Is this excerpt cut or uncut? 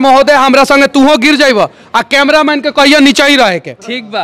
uncut